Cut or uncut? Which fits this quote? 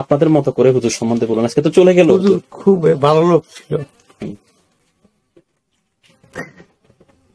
uncut